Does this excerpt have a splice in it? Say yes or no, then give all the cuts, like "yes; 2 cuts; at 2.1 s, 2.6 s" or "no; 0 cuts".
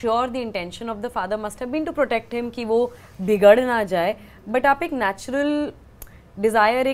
no; 0 cuts